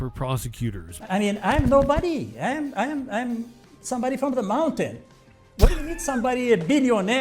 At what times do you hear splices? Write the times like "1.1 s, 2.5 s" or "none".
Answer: 0.9 s